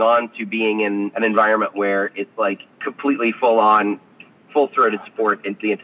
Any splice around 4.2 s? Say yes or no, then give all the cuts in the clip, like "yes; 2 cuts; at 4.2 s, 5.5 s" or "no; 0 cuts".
no; 2 cuts; at 1.1 s, 2.9 s